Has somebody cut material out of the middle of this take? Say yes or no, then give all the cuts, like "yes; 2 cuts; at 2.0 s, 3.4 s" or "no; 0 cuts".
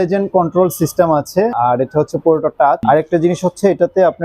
yes; 2 cuts; at 1.5 s, 2.8 s